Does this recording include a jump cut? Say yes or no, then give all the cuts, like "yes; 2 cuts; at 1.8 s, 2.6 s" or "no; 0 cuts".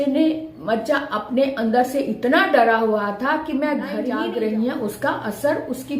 yes; 1 cut; at 4.1 s